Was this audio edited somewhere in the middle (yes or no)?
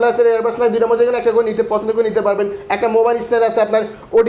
no